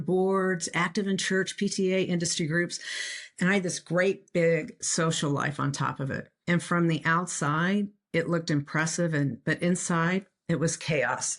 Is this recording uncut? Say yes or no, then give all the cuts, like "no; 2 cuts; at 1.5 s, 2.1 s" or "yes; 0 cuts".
no; 2 cuts; at 6.3 s, 10.3 s